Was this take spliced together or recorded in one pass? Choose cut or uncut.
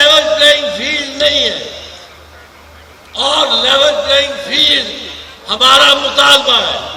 uncut